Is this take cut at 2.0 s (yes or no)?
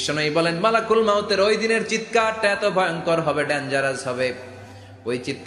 no